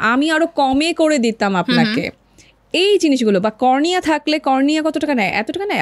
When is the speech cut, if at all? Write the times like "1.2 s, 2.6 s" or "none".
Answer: none

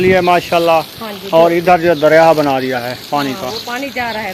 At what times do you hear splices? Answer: none

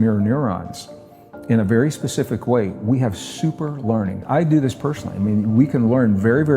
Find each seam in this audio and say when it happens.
4.2 s

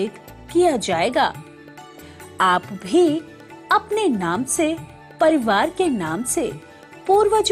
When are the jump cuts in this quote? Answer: none

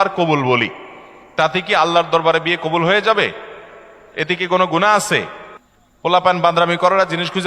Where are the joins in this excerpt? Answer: none

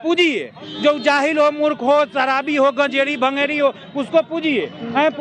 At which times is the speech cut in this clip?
none

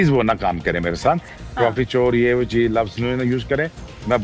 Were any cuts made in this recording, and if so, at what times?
1.3 s

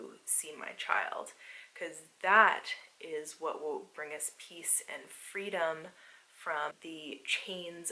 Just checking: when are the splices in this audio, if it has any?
6.8 s

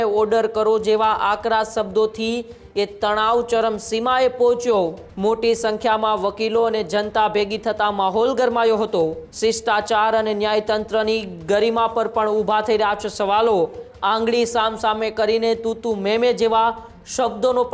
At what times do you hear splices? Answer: 5.0 s, 9.2 s, 13.9 s

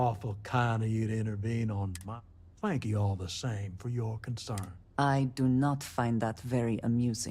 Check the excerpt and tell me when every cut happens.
2.0 s, 4.8 s

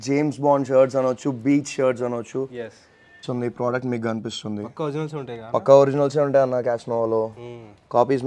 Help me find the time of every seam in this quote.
3.2 s

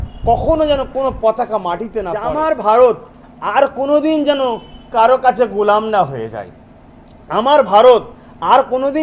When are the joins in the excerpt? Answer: 2.2 s

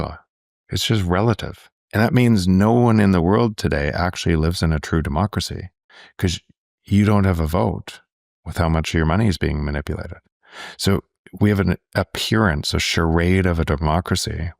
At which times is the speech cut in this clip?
1.8 s

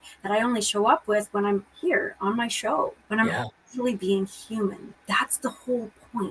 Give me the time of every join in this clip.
3.0 s, 4.9 s

